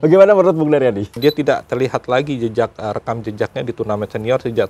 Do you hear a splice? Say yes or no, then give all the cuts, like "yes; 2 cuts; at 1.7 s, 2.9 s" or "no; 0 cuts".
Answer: yes; 1 cut; at 1.2 s